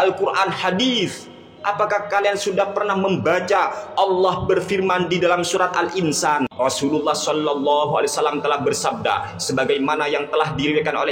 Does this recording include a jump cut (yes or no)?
yes